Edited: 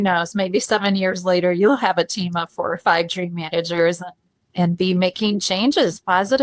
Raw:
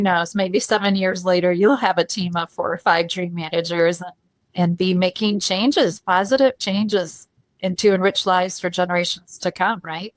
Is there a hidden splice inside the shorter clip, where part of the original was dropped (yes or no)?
no